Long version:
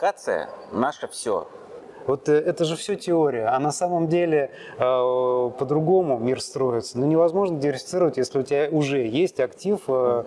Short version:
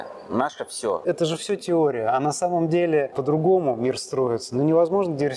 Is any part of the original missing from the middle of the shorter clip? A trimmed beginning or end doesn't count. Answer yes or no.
yes